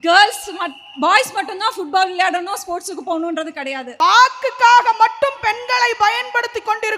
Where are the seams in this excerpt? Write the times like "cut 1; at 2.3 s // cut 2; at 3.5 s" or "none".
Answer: cut 1; at 3.9 s